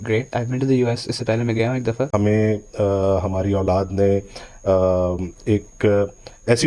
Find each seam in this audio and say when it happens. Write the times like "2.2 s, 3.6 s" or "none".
2.1 s

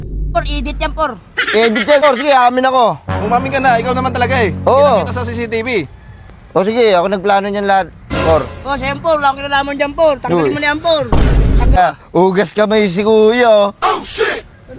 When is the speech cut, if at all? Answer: 2.0 s, 11.8 s

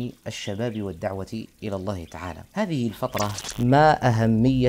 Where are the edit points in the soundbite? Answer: 2.4 s, 3.4 s

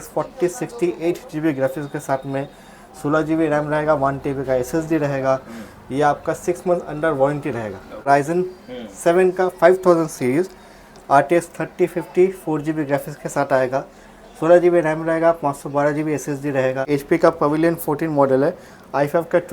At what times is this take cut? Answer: 8.1 s, 16.8 s

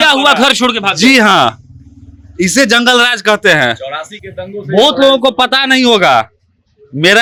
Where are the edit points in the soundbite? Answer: none

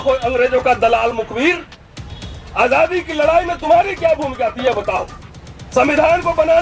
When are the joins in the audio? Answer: none

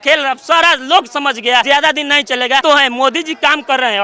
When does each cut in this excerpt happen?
1.6 s, 2.6 s

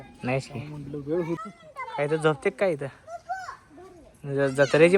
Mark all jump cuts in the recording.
1.4 s

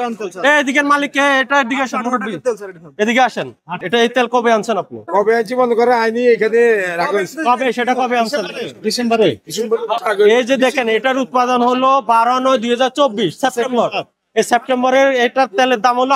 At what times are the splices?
3.8 s, 10.0 s

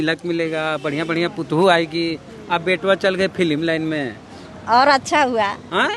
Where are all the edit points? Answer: none

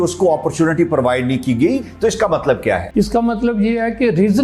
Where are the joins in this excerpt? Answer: 1.8 s, 2.9 s

